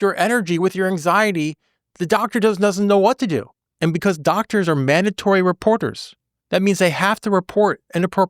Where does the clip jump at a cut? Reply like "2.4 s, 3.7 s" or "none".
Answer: 3.6 s

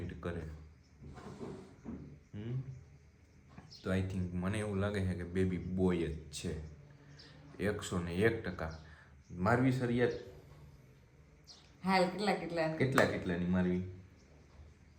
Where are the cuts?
none

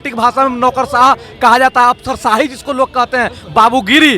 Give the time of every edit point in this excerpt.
none

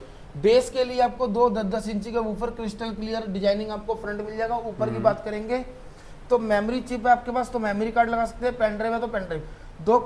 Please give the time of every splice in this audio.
none

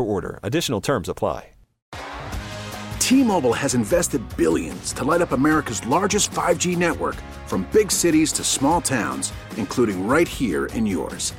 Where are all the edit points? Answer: 1.9 s

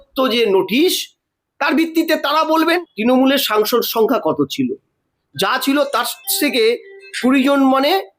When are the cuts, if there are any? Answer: 2.8 s

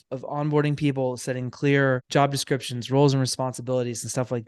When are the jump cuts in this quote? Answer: 2.0 s

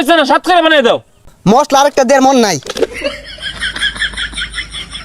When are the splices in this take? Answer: 1.2 s, 3.1 s

